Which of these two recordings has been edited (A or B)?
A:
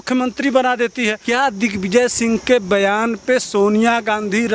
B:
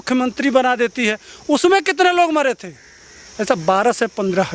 A